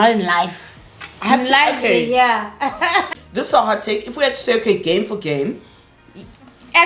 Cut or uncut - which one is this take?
cut